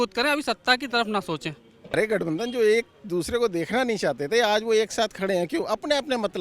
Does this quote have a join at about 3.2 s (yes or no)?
no